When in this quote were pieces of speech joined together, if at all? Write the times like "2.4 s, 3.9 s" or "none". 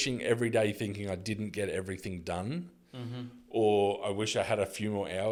none